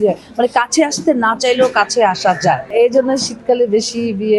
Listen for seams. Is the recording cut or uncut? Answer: cut